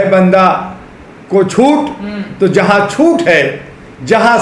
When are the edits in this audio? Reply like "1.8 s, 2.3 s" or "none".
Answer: none